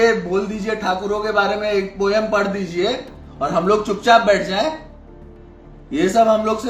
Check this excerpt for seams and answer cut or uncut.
uncut